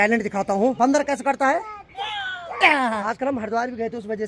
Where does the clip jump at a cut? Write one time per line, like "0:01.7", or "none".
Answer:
0:00.8
0:03.0